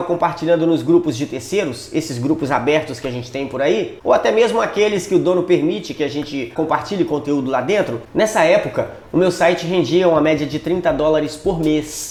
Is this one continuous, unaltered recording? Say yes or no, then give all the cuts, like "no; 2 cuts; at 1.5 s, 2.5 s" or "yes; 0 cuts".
yes; 0 cuts